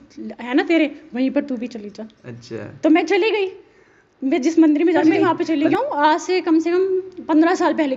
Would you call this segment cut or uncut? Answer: uncut